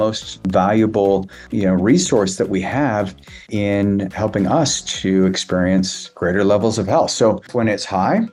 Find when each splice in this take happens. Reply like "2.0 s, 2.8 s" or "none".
none

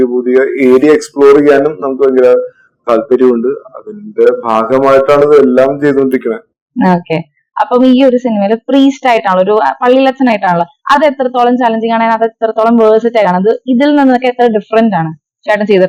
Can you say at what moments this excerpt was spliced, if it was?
none

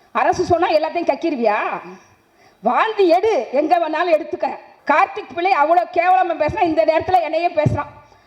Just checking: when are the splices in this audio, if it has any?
4.7 s

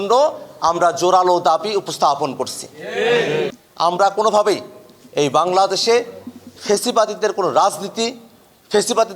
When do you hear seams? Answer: 3.6 s

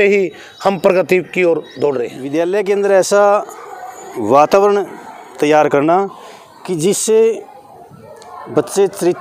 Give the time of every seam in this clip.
2.2 s

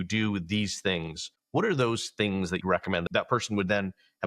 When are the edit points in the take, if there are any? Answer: 2.7 s

